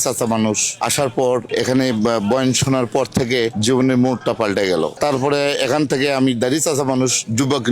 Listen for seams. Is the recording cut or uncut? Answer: cut